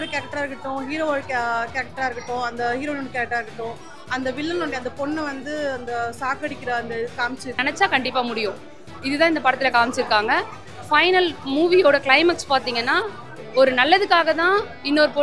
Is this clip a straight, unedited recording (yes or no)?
no